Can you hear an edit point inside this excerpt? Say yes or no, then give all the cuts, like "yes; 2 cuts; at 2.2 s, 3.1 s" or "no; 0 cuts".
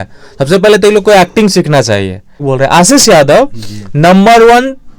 yes; 1 cut; at 2.4 s